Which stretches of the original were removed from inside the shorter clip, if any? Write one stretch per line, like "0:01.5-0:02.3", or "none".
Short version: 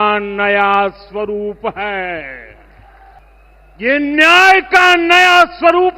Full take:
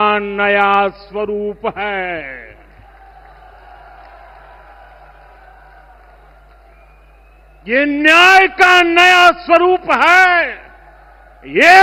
0:03.2-0:07.1